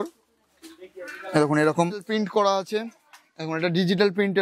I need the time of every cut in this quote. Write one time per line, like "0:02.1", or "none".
0:02.1